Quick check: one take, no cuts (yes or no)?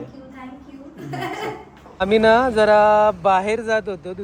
yes